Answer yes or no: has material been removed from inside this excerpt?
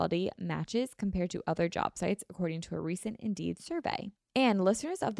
yes